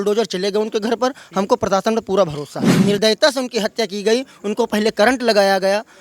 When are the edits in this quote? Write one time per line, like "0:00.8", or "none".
0:02.7